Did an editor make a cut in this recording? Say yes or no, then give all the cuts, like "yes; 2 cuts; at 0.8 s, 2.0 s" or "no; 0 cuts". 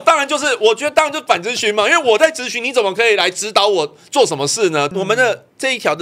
yes; 1 cut; at 4.9 s